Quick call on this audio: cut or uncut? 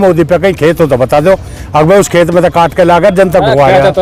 uncut